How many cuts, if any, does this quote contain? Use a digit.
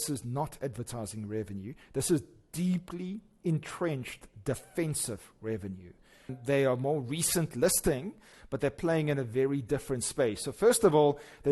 1